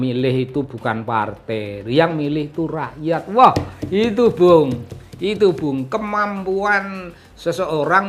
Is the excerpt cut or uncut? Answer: uncut